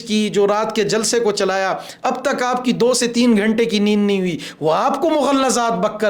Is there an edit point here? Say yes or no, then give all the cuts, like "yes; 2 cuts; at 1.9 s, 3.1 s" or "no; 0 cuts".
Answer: no; 0 cuts